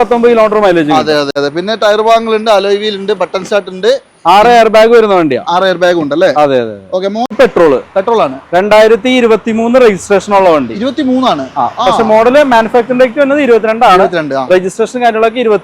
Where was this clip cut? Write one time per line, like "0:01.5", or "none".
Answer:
0:01.4
0:07.3